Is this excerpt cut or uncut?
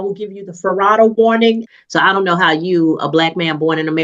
cut